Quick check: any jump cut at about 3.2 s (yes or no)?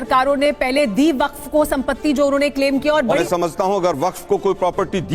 yes